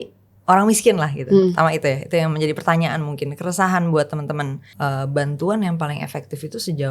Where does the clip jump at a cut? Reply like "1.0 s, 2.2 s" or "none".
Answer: 4.7 s